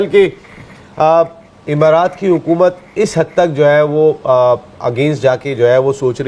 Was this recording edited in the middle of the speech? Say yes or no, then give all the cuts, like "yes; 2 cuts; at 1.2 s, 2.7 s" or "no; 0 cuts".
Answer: no; 0 cuts